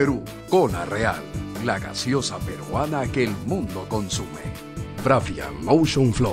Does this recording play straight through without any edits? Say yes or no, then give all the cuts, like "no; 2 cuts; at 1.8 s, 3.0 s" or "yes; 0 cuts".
no; 1 cut; at 4.4 s